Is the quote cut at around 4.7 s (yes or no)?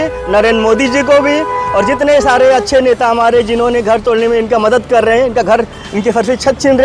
no